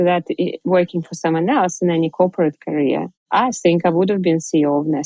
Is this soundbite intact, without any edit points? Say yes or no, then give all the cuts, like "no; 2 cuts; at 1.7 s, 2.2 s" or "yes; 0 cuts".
no; 1 cut; at 3.2 s